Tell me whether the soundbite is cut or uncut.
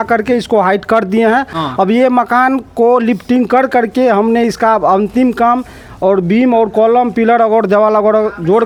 uncut